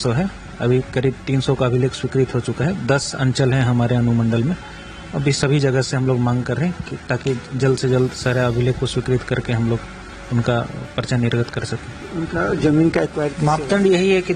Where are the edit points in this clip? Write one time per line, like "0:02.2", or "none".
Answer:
0:13.3